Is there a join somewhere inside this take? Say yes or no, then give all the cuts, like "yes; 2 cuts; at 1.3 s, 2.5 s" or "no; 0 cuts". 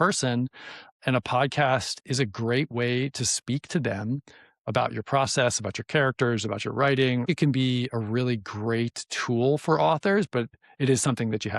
yes; 2 cuts; at 7.3 s, 10.5 s